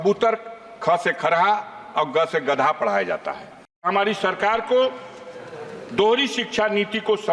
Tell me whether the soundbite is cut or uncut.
cut